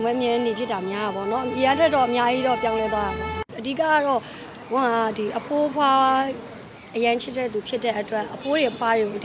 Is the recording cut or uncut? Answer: cut